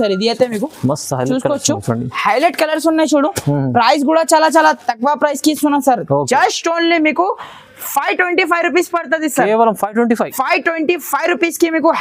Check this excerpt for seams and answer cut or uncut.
uncut